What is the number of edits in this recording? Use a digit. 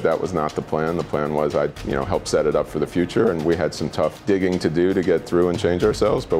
2